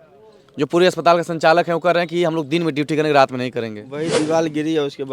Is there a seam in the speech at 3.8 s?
yes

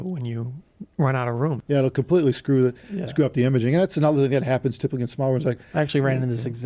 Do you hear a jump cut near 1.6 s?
yes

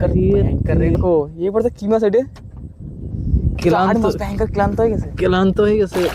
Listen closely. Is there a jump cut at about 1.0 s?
yes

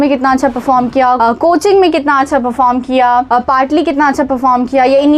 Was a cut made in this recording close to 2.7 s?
no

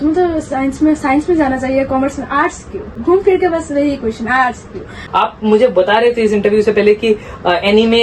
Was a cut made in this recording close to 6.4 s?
no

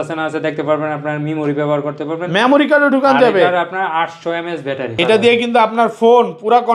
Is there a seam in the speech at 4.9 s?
yes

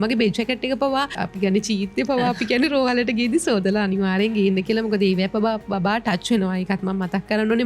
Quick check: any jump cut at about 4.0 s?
no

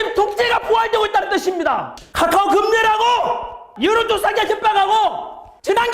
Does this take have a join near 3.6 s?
no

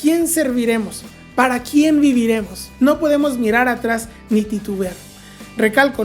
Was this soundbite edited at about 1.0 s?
no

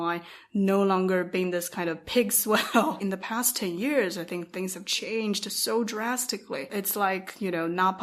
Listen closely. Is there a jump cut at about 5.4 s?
no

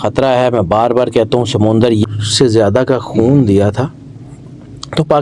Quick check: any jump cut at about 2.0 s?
yes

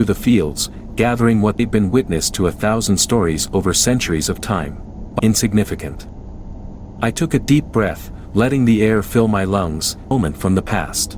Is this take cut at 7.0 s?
no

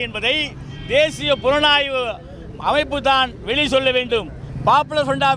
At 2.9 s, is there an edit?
no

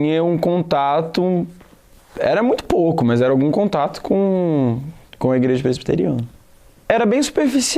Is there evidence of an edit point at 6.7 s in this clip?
yes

